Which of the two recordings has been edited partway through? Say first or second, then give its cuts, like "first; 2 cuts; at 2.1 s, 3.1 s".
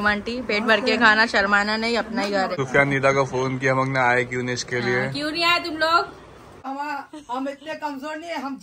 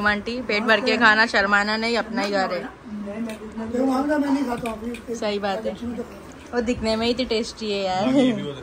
first; 2 cuts; at 2.6 s, 6.7 s